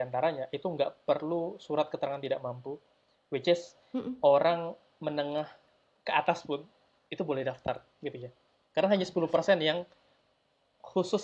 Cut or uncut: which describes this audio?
uncut